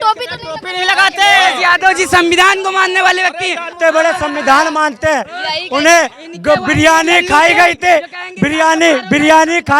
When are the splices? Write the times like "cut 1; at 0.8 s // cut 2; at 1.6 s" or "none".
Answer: cut 1; at 3.7 s